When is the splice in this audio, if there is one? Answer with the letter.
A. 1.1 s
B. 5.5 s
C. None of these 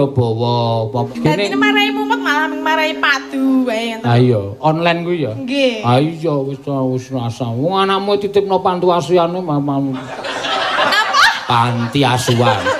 A